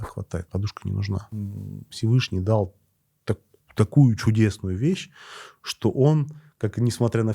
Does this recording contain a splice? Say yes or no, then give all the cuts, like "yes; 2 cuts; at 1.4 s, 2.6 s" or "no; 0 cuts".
yes; 1 cut; at 1.5 s